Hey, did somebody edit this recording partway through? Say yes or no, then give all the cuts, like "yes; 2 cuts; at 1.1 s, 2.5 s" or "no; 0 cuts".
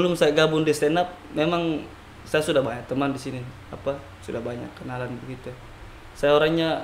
no; 0 cuts